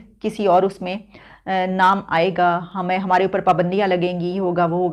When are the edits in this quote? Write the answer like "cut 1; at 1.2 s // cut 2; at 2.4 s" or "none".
none